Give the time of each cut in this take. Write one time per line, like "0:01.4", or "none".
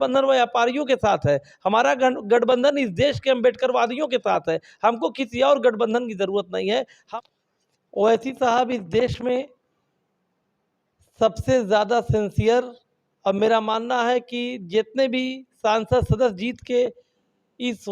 0:07.0